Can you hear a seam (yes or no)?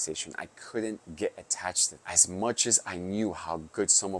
yes